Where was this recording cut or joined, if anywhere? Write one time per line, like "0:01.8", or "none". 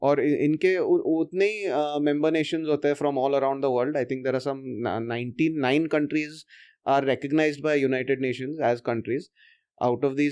none